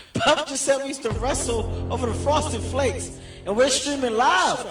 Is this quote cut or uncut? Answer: uncut